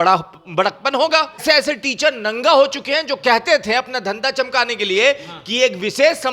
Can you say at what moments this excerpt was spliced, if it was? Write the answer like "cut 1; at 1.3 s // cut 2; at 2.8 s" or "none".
cut 1; at 1.4 s